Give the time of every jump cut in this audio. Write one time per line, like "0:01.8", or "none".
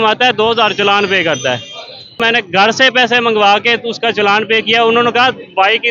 0:02.2

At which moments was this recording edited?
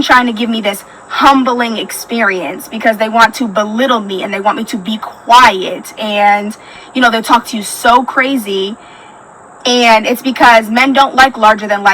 0:01.8

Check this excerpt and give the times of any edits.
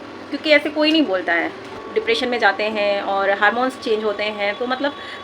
0:01.8

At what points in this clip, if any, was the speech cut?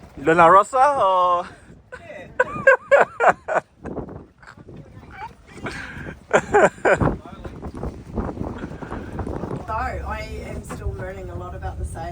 0:09.6

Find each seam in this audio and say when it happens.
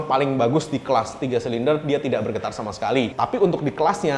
0:03.1

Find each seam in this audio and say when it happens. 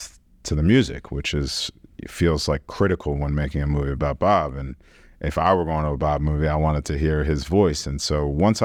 none

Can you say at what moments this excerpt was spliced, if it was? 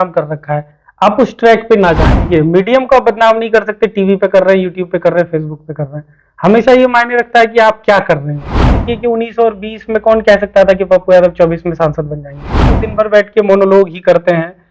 0:02.1
0:08.8
0:12.8

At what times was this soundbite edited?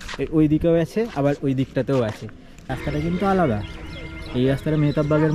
0:02.7

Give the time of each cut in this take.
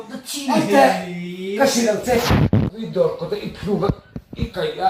0:02.7

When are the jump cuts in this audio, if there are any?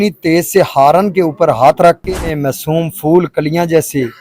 0:02.3

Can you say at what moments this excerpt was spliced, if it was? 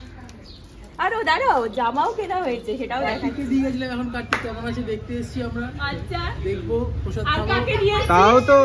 0:03.1

